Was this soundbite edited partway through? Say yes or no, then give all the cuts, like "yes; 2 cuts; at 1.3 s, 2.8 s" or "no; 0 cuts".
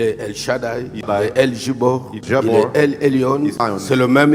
yes; 3 cuts; at 1.1 s, 2.2 s, 3.6 s